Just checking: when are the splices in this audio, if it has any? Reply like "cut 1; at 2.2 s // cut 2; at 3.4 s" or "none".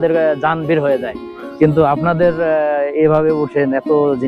none